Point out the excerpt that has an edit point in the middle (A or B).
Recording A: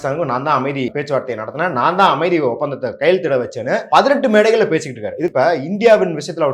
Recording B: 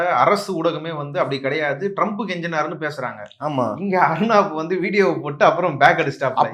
A